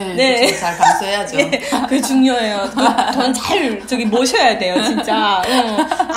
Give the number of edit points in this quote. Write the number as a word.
zero